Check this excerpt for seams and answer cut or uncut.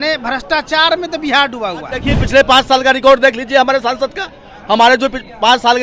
cut